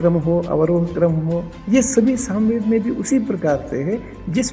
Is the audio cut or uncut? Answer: cut